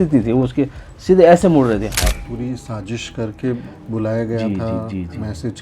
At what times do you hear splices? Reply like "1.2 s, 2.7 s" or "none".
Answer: 2.2 s